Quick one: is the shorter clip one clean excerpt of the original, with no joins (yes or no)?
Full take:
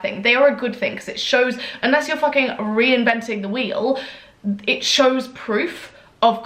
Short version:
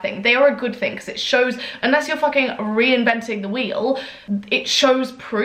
no